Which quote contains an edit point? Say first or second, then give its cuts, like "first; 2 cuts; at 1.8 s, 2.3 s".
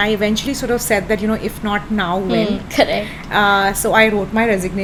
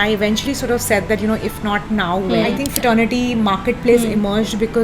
second; 1 cut; at 2.6 s